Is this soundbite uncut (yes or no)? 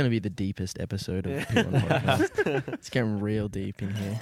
yes